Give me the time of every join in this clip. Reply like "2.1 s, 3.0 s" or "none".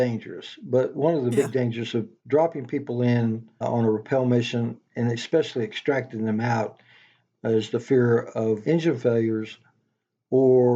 2.2 s, 3.6 s